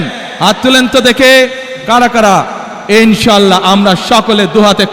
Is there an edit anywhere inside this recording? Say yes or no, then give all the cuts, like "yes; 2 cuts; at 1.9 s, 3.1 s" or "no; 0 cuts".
no; 0 cuts